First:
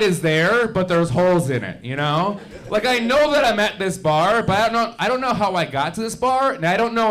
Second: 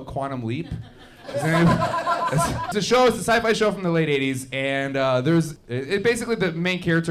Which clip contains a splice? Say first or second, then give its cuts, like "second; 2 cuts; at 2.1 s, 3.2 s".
second; 2 cuts; at 2.8 s, 5.6 s